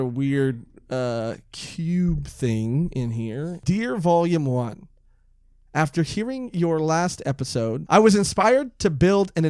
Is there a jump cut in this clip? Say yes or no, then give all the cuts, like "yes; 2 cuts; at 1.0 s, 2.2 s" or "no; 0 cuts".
yes; 2 cuts; at 3.6 s, 7.8 s